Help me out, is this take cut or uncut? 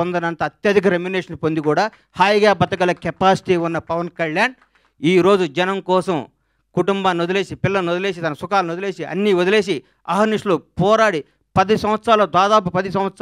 uncut